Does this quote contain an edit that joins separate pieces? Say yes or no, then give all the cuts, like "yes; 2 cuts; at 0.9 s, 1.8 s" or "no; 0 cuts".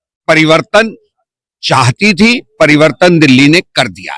no; 0 cuts